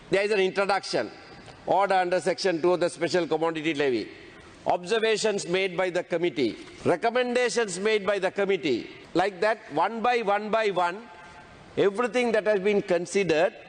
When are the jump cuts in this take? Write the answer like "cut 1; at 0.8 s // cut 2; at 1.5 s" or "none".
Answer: cut 1; at 6.7 s // cut 2; at 9.0 s